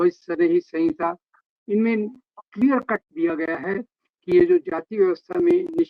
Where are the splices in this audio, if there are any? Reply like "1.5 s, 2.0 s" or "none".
none